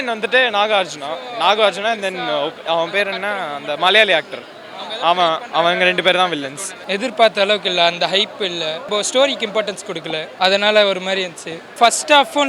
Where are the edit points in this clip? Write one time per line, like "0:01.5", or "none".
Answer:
0:06.7
0:08.8
0:10.3
0:11.7